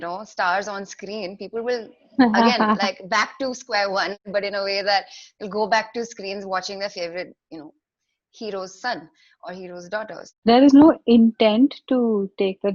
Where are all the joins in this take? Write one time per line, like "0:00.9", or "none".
0:04.2
0:10.3